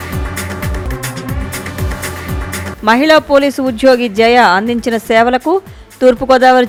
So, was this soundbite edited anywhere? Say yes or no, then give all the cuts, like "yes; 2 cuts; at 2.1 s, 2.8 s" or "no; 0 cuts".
no; 0 cuts